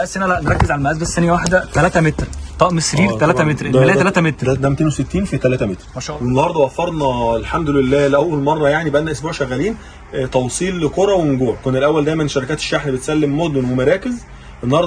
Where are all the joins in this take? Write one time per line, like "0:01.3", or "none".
0:05.9